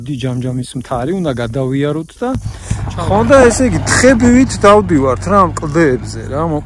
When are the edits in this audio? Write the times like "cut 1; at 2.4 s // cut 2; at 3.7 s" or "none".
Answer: cut 1; at 2.4 s